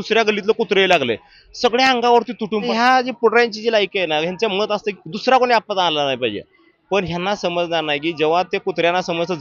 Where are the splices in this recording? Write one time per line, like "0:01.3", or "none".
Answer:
0:02.7